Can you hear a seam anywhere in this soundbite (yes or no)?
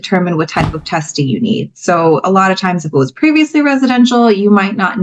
no